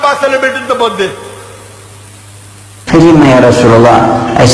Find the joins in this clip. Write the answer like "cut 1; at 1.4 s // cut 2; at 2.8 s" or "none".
cut 1; at 2.7 s